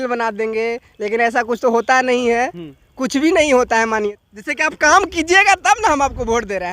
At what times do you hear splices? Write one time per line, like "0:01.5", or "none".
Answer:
0:04.1